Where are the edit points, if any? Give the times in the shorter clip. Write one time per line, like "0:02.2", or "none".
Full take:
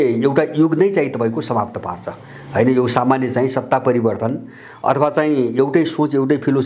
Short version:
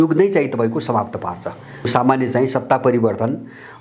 0:01.9